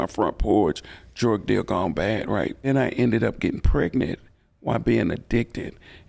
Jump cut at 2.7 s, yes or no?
yes